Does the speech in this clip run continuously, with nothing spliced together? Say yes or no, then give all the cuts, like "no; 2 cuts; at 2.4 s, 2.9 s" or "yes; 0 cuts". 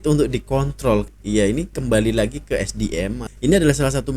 no; 2 cuts; at 1.1 s, 3.3 s